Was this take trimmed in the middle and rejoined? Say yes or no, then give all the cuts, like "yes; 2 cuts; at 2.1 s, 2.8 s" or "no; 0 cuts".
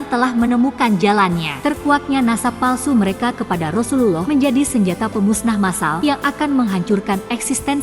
yes; 3 cuts; at 1.5 s, 4.2 s, 5.9 s